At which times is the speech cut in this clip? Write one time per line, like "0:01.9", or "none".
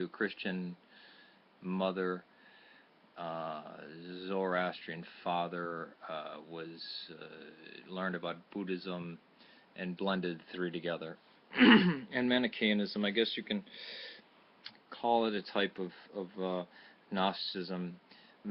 0:08.5